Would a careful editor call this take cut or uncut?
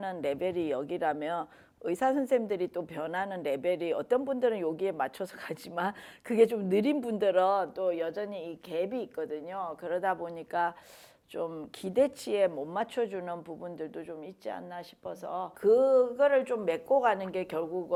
uncut